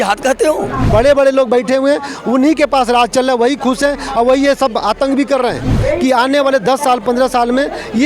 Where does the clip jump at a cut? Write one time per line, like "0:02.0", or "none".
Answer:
0:00.9
0:05.8